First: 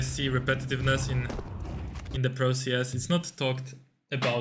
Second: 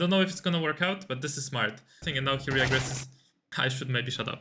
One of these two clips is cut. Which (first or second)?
second